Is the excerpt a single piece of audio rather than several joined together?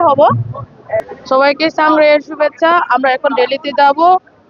no; 1 cut; at 1.0 s

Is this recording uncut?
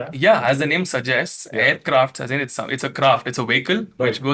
yes; 0 cuts

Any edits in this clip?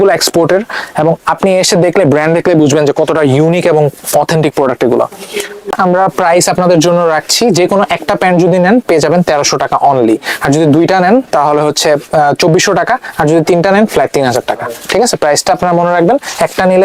no; 0 cuts

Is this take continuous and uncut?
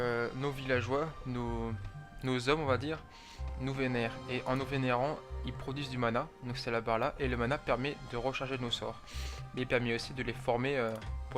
no; 1 cut; at 10.1 s

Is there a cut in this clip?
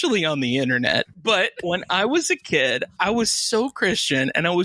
yes; 2 cuts; at 1.6 s, 2.9 s

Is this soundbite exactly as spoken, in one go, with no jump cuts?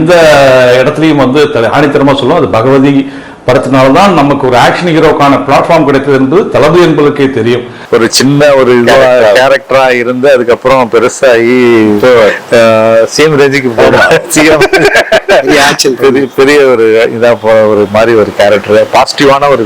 no; 1 cut; at 7.8 s

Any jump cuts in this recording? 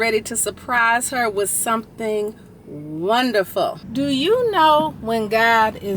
yes; 1 cut; at 3.8 s

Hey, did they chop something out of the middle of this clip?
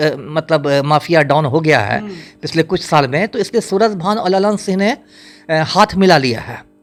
no; 0 cuts

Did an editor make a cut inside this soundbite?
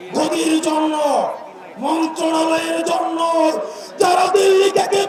no; 0 cuts

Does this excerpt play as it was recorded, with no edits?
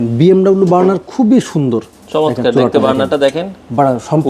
yes; 0 cuts

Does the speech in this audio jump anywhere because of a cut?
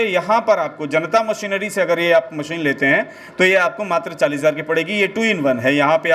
no; 0 cuts

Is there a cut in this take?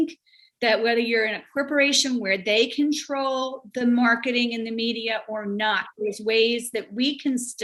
no; 0 cuts

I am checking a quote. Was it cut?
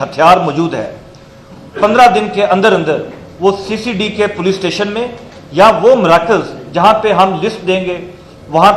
no; 0 cuts

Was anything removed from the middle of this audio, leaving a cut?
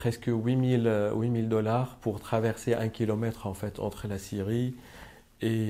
no; 0 cuts

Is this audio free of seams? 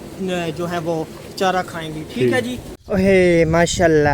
no; 1 cut; at 2.7 s

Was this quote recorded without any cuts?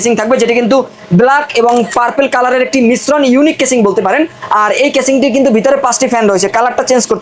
yes; 0 cuts

